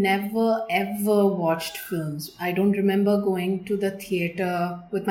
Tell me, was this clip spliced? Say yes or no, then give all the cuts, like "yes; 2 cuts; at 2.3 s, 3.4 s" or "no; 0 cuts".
no; 0 cuts